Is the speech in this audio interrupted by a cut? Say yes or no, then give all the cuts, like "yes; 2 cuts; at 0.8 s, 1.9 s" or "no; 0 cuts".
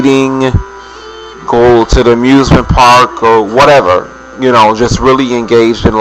yes; 1 cut; at 1.4 s